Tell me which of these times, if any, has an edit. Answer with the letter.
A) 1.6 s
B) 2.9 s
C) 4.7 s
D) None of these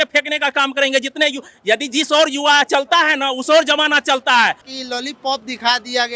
C